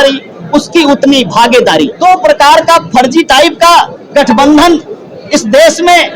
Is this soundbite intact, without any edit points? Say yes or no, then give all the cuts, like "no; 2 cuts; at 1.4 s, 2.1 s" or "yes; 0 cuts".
no; 2 cuts; at 1.9 s, 4.0 s